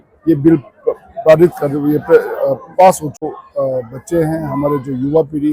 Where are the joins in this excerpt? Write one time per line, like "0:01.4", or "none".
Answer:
0:03.3